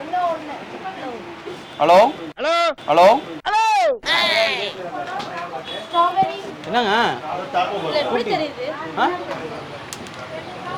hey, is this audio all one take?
yes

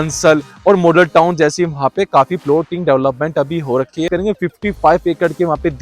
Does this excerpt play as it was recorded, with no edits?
no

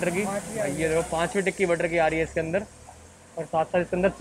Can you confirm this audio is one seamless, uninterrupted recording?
yes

